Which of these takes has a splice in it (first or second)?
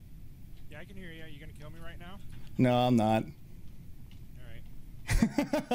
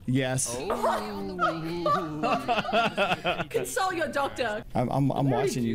second